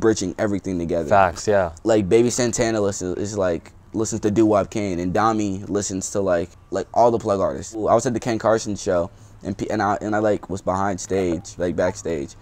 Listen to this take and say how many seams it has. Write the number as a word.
three